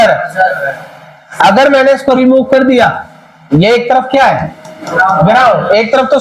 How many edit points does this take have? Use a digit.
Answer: 0